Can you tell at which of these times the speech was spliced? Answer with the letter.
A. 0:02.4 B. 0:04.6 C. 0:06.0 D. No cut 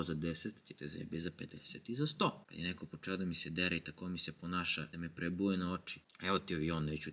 A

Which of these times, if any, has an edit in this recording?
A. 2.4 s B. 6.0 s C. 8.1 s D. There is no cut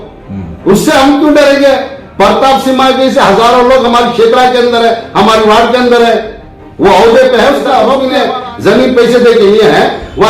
C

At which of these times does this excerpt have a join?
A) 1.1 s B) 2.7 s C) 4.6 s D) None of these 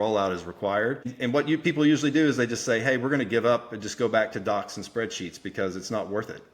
A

